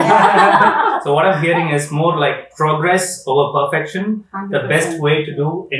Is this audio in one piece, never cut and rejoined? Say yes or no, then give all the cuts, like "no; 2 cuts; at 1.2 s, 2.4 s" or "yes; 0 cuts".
no; 1 cut; at 1.0 s